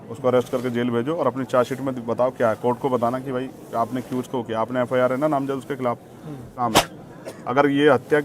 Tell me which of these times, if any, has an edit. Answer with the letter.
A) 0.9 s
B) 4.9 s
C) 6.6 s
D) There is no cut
C